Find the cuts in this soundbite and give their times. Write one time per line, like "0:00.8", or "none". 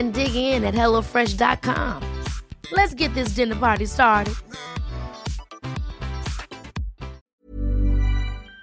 0:07.2